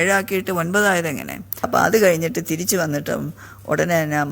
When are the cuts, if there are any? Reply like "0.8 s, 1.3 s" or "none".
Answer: 1.7 s